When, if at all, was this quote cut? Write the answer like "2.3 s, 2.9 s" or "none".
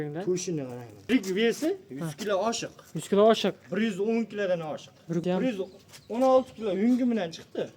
1.1 s, 5.2 s